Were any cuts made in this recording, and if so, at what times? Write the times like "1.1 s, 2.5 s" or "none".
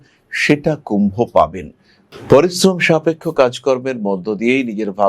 2.1 s